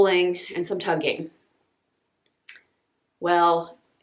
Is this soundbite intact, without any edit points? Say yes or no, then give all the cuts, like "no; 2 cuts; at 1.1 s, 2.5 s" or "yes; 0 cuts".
yes; 0 cuts